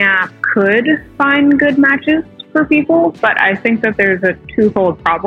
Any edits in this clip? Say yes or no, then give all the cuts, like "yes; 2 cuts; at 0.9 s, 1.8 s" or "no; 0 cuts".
no; 0 cuts